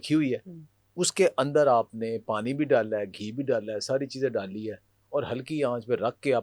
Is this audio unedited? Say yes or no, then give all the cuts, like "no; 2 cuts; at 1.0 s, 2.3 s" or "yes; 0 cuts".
yes; 0 cuts